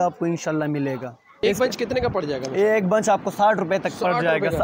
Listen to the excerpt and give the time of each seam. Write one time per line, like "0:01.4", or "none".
0:01.4